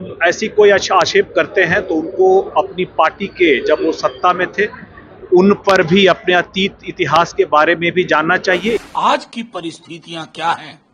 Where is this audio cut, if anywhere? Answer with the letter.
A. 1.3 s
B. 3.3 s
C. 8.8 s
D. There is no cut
C